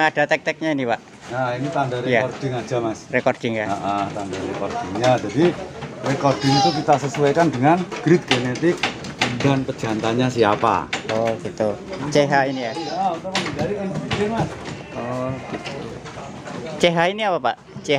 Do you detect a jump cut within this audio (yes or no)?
no